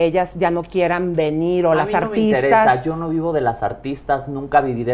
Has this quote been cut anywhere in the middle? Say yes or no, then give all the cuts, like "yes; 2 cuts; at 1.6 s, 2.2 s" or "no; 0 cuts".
no; 0 cuts